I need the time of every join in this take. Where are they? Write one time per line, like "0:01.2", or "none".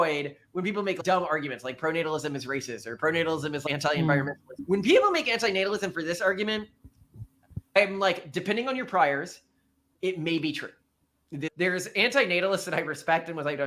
0:01.0
0:03.6
0:04.5
0:07.8
0:11.5